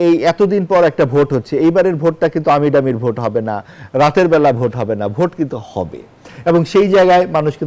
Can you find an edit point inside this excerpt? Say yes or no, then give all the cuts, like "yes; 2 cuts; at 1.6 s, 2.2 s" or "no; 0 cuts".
no; 0 cuts